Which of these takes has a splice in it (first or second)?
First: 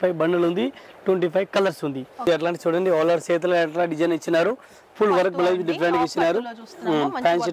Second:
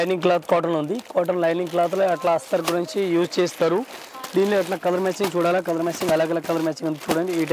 first